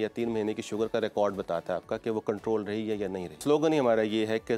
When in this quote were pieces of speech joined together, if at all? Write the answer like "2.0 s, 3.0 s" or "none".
3.4 s

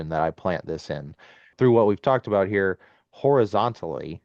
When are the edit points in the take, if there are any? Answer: 1.5 s

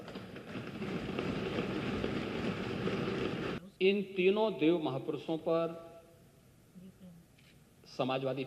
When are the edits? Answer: 3.6 s

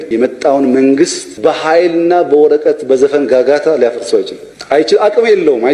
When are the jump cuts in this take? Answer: none

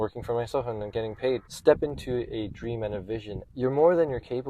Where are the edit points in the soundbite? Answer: 1.5 s, 3.4 s

